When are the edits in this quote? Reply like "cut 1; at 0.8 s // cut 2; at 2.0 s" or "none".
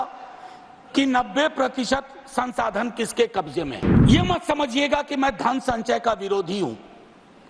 cut 1; at 3.9 s